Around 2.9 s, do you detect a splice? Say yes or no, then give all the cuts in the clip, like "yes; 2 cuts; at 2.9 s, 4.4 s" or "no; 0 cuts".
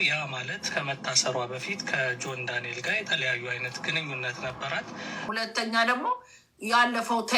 no; 1 cut; at 5.3 s